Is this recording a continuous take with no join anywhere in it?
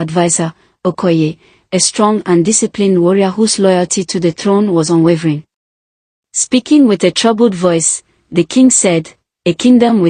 yes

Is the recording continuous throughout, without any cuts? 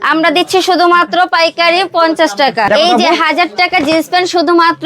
no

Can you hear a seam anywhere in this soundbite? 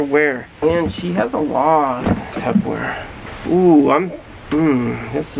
no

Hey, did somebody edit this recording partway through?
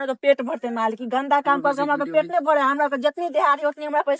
no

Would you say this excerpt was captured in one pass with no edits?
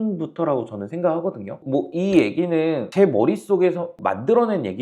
no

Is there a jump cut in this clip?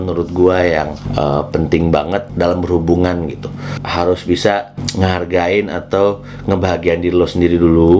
yes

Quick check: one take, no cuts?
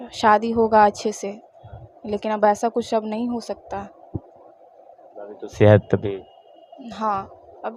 yes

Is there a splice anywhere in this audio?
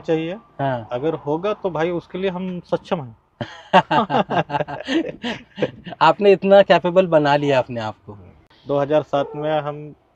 no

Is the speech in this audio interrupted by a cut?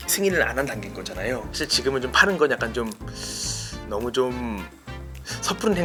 no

